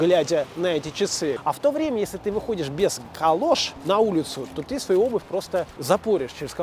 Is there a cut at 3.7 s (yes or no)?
yes